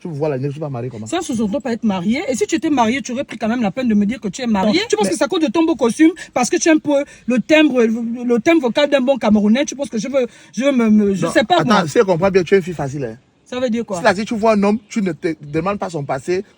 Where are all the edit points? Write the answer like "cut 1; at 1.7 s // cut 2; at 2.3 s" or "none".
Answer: cut 1; at 4.8 s